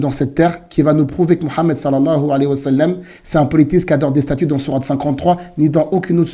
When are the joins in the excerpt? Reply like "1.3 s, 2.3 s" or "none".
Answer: none